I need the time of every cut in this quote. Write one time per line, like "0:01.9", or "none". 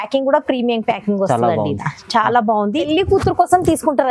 0:02.9